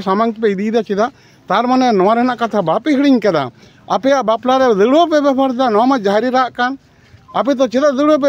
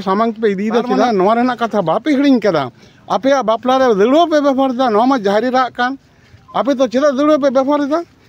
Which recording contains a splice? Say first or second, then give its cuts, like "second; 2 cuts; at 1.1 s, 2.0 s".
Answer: second; 1 cut; at 1.0 s